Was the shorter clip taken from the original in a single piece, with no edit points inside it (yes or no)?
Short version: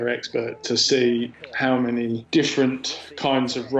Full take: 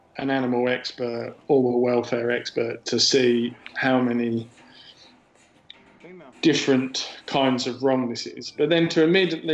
no